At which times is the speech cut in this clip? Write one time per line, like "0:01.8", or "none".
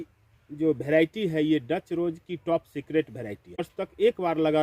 0:03.7